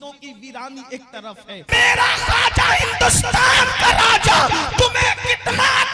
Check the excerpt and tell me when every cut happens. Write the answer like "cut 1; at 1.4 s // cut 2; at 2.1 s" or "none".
cut 1; at 1.7 s